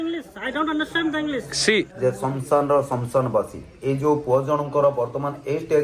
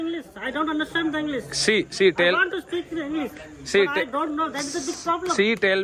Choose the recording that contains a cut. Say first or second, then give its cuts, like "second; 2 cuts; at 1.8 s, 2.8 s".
first; 1 cut; at 1.9 s